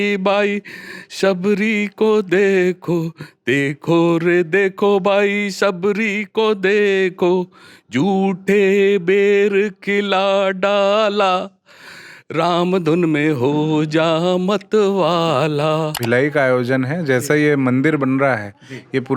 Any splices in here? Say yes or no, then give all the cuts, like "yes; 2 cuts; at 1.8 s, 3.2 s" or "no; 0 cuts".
yes; 1 cut; at 16.0 s